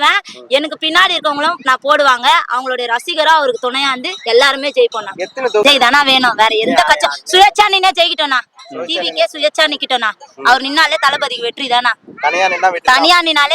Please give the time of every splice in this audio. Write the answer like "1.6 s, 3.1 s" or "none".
5.6 s

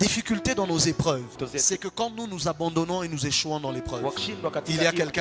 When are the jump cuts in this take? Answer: none

